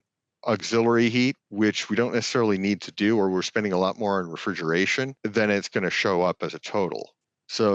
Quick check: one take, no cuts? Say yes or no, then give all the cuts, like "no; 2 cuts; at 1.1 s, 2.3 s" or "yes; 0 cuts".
no; 2 cuts; at 1.4 s, 5.2 s